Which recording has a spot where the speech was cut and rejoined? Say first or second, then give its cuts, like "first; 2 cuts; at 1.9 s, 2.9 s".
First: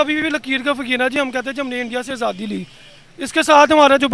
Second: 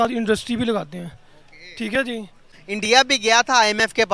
second; 1 cut; at 2.5 s